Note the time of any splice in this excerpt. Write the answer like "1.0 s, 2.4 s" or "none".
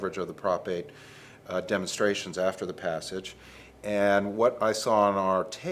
none